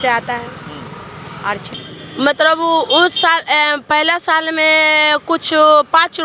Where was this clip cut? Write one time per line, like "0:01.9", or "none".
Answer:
0:01.7